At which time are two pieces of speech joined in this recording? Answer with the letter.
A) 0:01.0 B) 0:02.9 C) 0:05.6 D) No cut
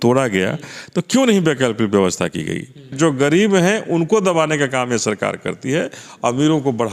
B